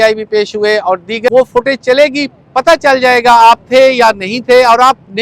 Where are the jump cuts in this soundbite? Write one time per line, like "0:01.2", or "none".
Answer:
0:01.3